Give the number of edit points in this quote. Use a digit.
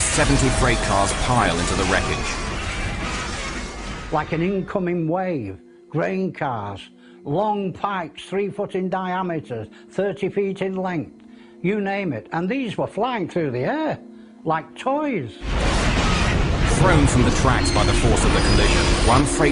1